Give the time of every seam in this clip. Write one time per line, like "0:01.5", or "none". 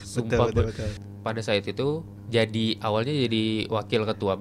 0:01.0
0:02.1